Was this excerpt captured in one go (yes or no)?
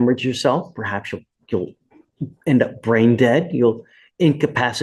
yes